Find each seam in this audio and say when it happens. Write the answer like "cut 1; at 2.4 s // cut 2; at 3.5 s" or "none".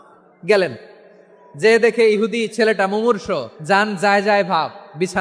cut 1; at 3.5 s